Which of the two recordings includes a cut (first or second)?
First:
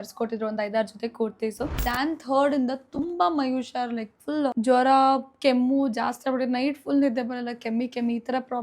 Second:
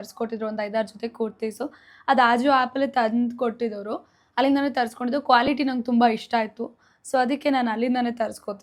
first